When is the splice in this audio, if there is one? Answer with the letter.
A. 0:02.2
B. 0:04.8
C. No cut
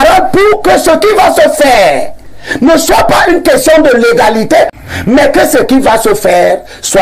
B